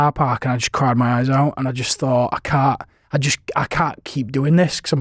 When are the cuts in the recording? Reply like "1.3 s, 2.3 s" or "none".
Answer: none